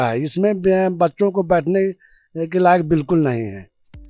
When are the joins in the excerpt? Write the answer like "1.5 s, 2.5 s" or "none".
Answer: none